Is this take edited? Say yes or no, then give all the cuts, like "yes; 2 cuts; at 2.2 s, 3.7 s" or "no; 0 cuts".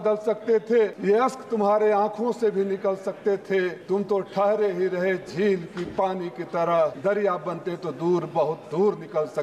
yes; 3 cuts; at 1.0 s, 3.8 s, 7.0 s